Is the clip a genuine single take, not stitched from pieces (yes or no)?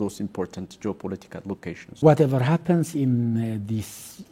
no